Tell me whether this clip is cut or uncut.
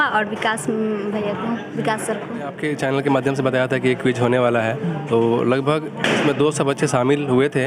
cut